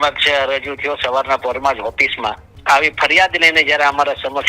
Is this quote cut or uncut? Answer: cut